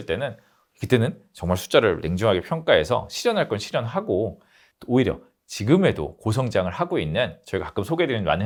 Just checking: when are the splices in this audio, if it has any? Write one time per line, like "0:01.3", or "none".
none